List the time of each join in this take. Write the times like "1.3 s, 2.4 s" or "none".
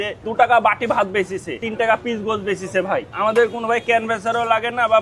1.6 s, 3.1 s